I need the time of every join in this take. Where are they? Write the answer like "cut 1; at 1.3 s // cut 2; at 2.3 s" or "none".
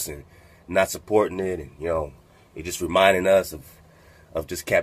cut 1; at 1.0 s